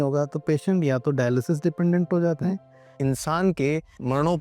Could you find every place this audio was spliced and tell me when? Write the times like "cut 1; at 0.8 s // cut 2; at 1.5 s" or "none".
cut 1; at 2.9 s